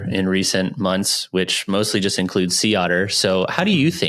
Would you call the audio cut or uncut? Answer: uncut